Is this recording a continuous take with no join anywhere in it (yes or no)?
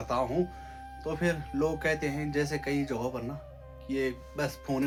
yes